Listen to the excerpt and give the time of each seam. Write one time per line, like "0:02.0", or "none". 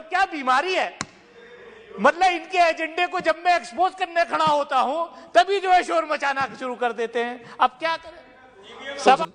none